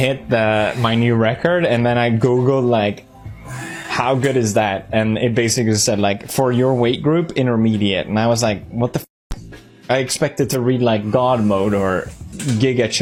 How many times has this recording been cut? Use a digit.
0